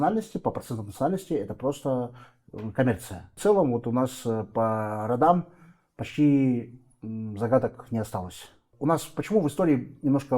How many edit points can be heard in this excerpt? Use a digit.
2